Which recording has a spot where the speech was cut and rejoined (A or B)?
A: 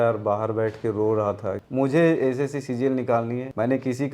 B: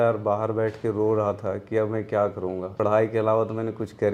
A